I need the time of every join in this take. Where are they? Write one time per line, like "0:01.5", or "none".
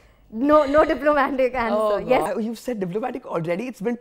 0:02.3